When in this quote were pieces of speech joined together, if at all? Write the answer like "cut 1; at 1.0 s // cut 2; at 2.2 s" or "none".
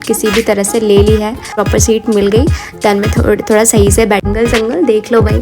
cut 1; at 1.6 s // cut 2; at 4.3 s